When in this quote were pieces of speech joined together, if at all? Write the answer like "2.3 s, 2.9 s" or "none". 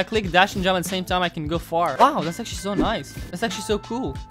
none